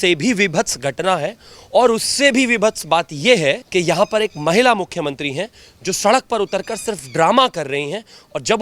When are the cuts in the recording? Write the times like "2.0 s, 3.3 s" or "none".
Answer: 3.6 s